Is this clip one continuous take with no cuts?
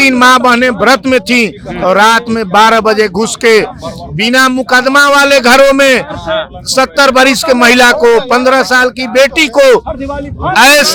yes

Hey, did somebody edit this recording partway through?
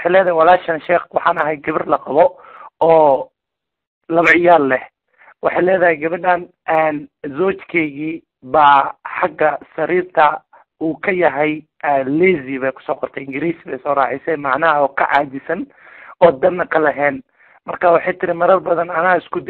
yes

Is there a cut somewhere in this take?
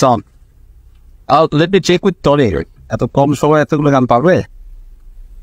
no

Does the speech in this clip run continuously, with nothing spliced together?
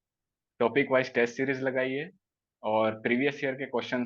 yes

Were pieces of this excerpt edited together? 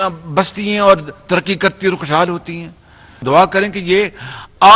yes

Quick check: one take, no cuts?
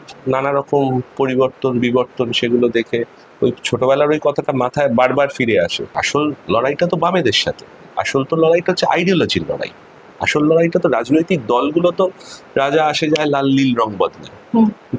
no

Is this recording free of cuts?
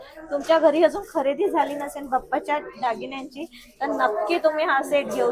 yes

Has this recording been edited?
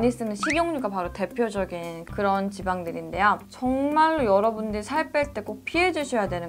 yes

